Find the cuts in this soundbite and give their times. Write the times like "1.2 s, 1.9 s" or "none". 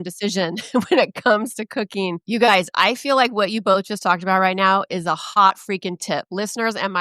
2.2 s

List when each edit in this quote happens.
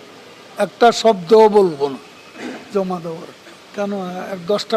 3.6 s

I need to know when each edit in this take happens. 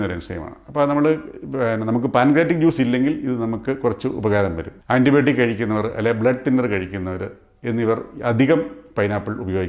4.7 s

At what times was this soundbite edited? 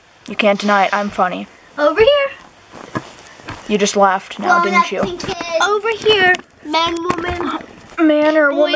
none

